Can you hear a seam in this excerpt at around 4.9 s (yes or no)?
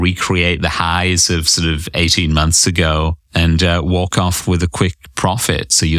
no